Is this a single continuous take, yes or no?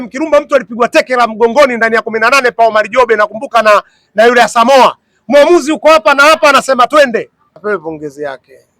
no